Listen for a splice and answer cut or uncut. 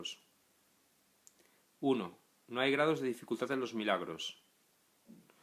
cut